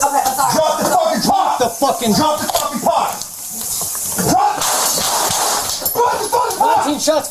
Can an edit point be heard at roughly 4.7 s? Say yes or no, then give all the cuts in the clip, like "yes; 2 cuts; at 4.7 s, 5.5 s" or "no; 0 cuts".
yes; 1 cut; at 4.7 s